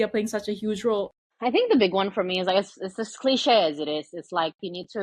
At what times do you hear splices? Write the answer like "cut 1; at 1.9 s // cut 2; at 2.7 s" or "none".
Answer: cut 1; at 1.3 s